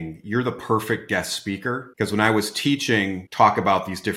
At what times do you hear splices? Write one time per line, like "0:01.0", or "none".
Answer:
0:01.9
0:03.2